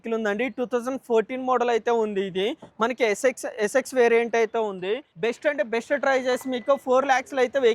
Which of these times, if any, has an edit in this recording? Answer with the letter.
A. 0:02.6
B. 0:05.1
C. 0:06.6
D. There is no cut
B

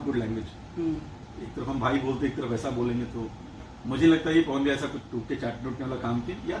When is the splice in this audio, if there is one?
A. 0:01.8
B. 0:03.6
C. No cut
B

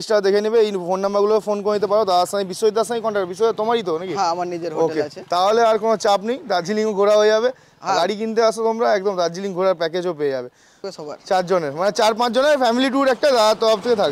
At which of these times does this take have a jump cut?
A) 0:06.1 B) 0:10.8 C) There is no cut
B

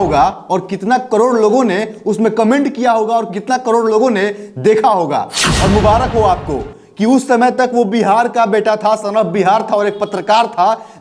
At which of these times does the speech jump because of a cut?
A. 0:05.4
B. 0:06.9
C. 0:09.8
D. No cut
A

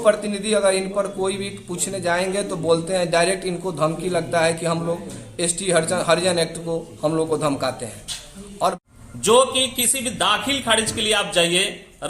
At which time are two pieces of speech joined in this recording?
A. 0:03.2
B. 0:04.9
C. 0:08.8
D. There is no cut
C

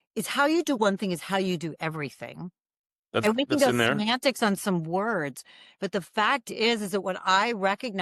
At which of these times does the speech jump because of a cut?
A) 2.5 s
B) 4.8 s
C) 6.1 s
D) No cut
D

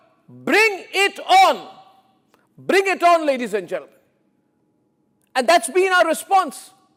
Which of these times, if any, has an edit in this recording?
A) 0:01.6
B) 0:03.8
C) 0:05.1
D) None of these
D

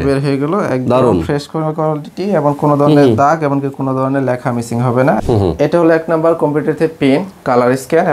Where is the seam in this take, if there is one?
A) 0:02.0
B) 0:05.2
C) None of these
B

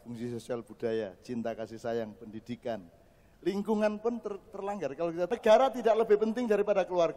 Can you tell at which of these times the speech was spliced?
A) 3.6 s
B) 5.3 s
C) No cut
B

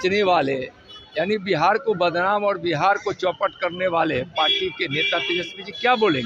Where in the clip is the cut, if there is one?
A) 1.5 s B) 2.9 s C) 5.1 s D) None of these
D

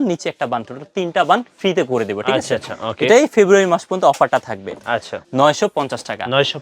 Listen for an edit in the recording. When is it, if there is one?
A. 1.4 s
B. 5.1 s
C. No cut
B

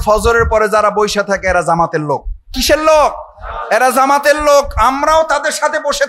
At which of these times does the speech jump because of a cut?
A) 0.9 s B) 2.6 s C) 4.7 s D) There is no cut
B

